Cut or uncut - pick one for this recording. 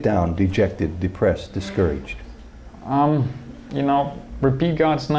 uncut